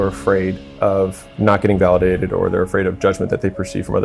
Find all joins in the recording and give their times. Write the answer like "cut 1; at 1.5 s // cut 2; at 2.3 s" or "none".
cut 1; at 1.3 s

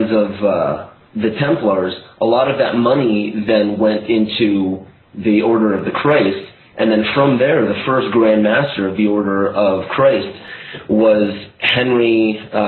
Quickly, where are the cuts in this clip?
cut 1; at 7.0 s

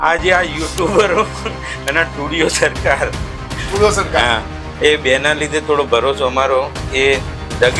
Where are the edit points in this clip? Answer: none

